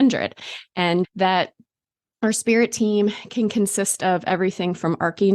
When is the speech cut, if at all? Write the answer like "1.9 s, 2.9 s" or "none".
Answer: 1.1 s